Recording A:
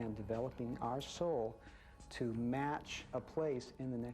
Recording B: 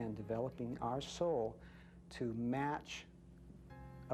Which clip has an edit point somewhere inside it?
A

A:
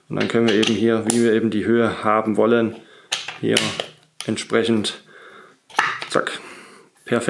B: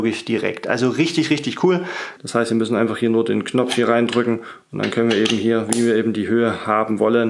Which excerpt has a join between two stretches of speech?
B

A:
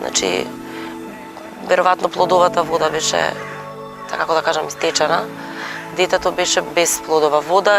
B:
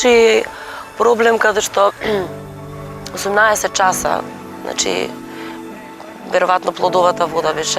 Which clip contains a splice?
A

